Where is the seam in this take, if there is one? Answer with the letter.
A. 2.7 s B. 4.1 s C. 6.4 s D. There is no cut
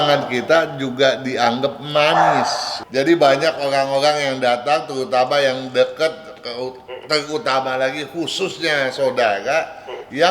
A